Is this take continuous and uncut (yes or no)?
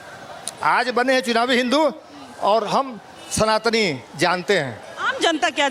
yes